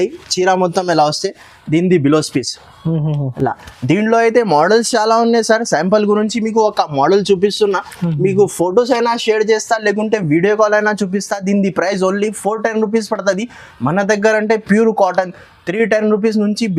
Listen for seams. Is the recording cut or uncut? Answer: uncut